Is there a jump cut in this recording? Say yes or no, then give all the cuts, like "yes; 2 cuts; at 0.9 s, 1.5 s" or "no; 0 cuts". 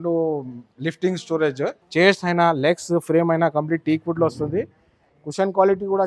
yes; 1 cut; at 1.8 s